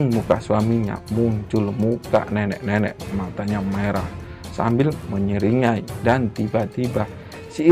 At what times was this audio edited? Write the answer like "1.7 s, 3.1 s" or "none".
none

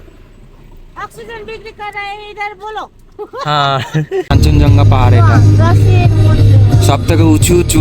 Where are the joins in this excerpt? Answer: 4.3 s

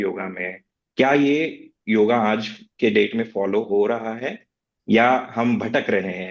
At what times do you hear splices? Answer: none

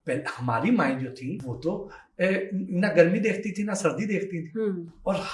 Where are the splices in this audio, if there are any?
1.5 s

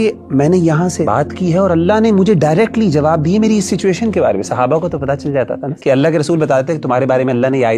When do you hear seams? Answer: 1.0 s, 5.6 s

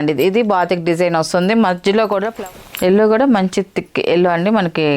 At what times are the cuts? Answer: 2.3 s

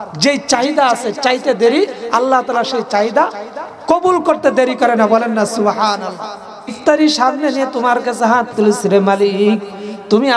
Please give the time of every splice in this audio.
6.7 s

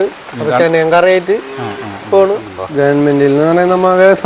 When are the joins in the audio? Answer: 2.6 s

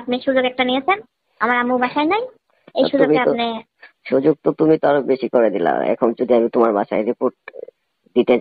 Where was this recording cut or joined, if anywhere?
none

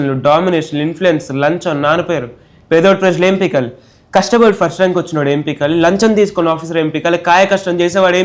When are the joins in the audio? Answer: none

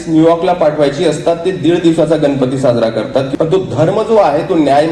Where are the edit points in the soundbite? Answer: 3.3 s

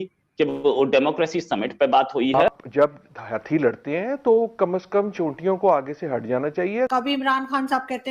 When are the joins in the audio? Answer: 2.2 s, 6.9 s

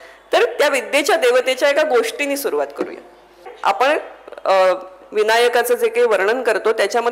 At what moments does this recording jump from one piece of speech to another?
3.5 s

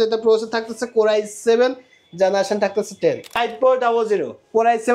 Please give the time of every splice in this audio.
3.4 s

